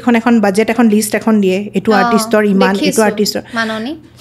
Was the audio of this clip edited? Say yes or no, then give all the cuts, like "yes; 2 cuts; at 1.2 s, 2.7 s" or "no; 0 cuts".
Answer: no; 0 cuts